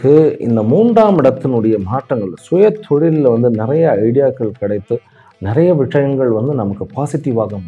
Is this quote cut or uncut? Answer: uncut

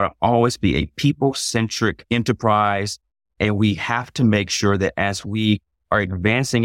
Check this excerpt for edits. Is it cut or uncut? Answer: cut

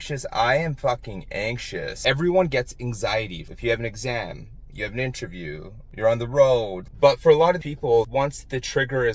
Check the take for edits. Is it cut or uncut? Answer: cut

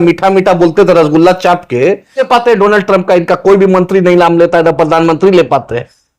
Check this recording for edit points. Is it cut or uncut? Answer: cut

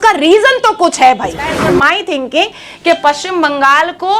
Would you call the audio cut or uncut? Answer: cut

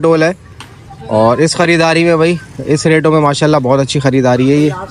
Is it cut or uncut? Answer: uncut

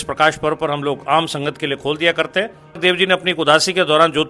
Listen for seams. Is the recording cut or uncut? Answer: cut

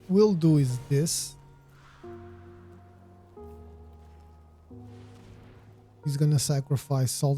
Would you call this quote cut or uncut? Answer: cut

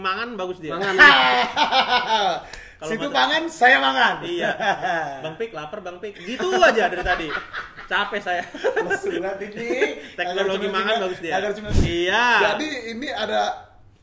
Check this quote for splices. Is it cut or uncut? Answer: cut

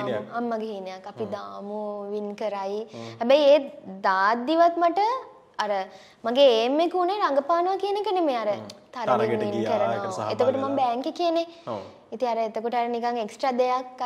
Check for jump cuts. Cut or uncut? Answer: uncut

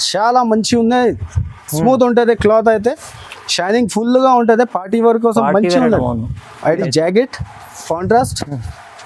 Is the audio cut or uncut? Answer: cut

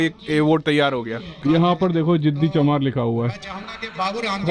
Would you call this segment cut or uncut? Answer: cut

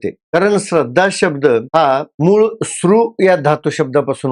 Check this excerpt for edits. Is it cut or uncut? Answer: uncut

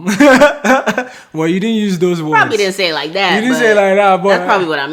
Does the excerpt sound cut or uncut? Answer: uncut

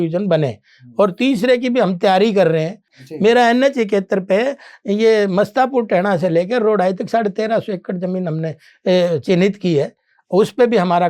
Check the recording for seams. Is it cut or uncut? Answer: cut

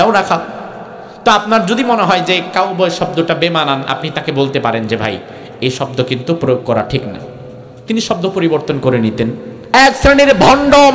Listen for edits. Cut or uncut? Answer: cut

